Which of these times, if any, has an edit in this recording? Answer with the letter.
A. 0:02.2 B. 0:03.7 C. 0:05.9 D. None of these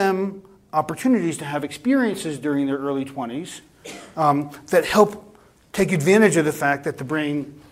D